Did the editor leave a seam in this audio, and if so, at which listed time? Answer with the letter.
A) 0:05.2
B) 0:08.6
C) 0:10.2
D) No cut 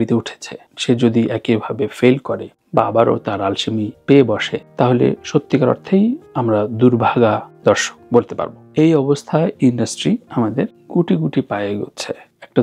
B